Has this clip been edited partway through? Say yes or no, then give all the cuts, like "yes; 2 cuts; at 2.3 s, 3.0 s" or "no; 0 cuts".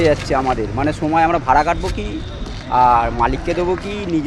no; 0 cuts